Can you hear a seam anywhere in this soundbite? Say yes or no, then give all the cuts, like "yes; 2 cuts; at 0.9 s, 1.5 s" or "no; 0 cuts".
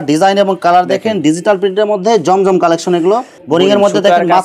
yes; 1 cut; at 3.3 s